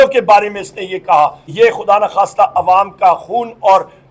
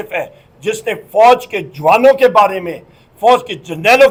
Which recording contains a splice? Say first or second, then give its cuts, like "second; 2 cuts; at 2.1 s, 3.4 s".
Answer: first; 1 cut; at 1.4 s